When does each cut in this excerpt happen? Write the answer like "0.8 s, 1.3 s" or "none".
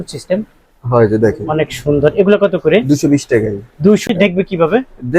4.1 s